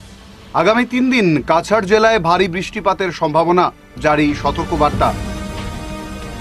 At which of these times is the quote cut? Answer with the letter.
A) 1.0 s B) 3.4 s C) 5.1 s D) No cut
D